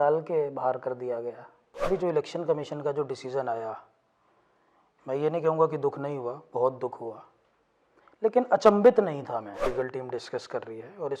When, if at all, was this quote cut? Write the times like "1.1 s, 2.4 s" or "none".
1.9 s, 9.6 s